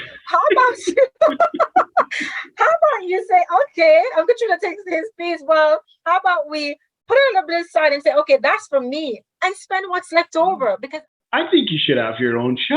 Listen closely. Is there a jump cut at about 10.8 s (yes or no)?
yes